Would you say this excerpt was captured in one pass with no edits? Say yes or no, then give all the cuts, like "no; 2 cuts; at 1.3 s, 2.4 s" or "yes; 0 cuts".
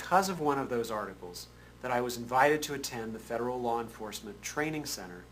yes; 0 cuts